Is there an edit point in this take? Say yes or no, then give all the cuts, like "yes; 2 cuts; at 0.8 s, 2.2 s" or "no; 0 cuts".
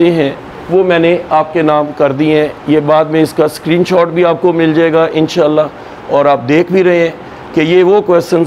no; 0 cuts